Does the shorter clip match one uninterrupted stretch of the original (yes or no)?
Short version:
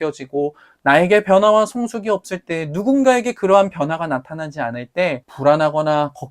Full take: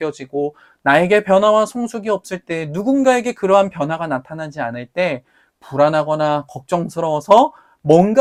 no